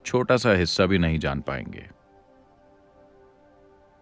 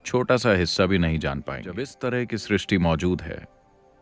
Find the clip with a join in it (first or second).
second